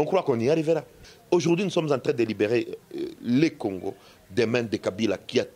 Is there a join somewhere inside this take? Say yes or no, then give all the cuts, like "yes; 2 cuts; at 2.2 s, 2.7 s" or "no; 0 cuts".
yes; 1 cut; at 1.1 s